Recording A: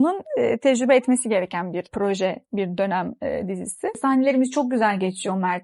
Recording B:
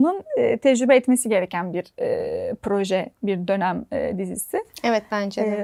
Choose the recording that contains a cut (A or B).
A